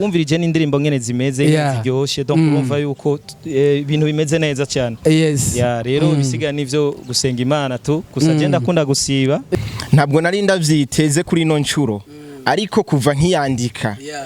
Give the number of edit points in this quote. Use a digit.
1